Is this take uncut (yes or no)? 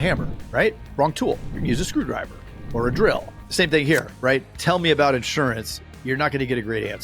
no